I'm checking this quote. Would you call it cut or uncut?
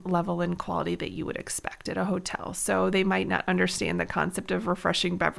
uncut